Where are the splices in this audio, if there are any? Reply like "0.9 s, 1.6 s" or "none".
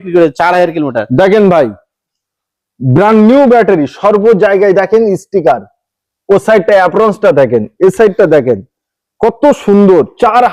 none

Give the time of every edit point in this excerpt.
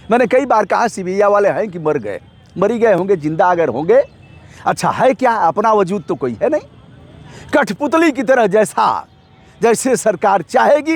none

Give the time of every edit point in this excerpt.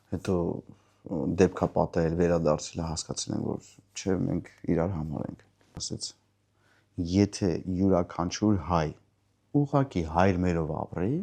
5.8 s

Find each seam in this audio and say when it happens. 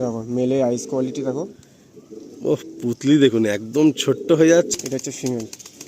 4.7 s

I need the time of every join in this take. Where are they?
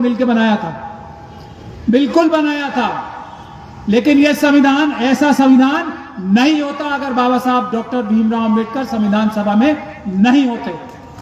none

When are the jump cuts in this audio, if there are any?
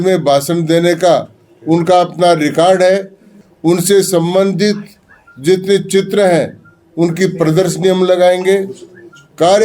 3.3 s

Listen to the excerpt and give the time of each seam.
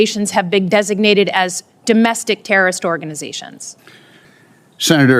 4.2 s

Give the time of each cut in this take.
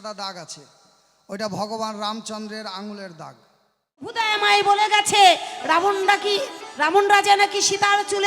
4.1 s

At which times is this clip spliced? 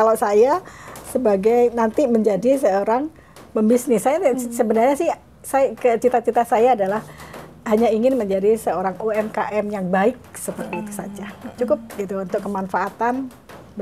none

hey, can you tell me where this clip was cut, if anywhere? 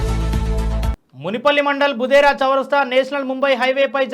1.0 s

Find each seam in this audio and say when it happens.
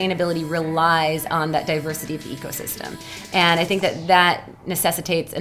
none

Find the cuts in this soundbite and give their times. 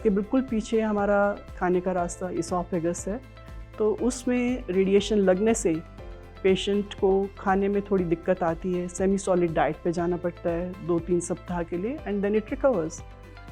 none

